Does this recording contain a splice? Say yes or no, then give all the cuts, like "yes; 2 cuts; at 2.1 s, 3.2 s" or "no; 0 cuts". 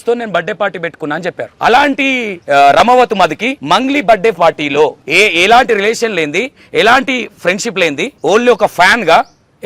yes; 5 cuts; at 1.5 s, 2.3 s, 3.5 s, 5.0 s, 8.1 s